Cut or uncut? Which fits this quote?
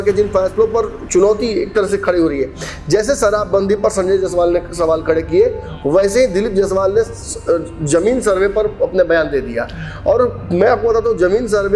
uncut